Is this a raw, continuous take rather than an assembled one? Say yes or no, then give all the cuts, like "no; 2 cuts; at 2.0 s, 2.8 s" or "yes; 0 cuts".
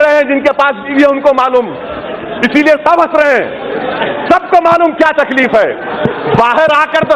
yes; 0 cuts